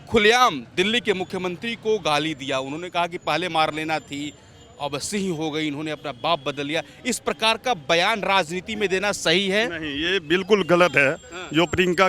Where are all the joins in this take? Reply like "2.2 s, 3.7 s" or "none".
none